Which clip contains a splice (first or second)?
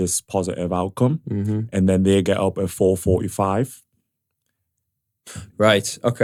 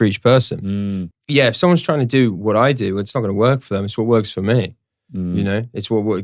second